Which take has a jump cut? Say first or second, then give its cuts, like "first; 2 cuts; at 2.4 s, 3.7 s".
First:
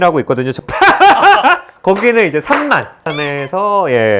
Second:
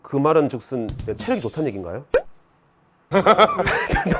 first; 1 cut; at 3.1 s